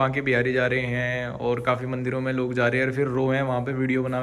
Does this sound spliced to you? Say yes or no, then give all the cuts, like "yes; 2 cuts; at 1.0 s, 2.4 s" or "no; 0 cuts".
no; 0 cuts